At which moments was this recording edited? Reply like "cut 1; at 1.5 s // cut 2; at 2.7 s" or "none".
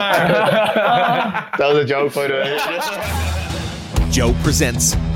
cut 1; at 3.0 s